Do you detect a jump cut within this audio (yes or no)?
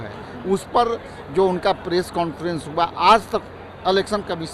no